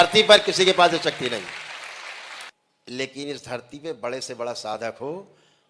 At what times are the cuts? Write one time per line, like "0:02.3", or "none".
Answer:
0:02.5